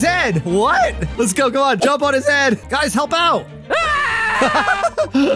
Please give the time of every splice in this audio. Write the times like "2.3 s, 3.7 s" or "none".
1.8 s, 2.6 s